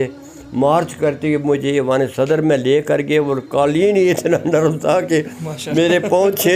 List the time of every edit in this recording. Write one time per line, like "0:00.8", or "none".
none